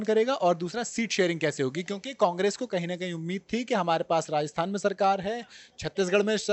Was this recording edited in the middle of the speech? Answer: no; 0 cuts

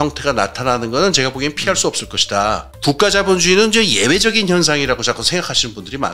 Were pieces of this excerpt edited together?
yes; 1 cut; at 2.7 s

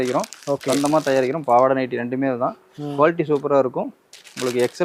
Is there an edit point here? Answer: no; 0 cuts

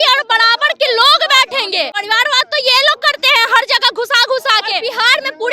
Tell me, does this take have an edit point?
yes; 2 cuts; at 2.0 s, 4.8 s

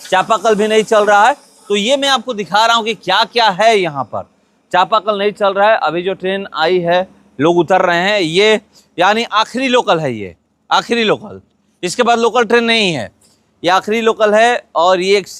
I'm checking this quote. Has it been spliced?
no; 0 cuts

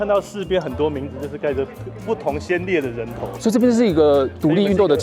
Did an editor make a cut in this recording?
no; 0 cuts

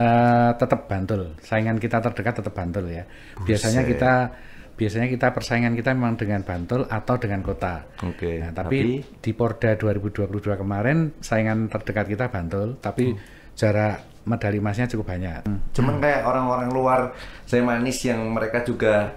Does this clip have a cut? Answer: yes; 1 cut; at 15.5 s

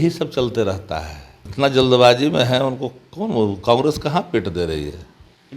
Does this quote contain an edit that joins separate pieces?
yes; 1 cut; at 1.5 s

